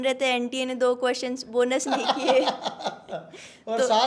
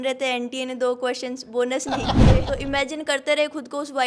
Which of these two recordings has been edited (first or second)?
second